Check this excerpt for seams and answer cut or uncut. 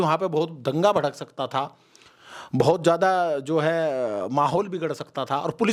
uncut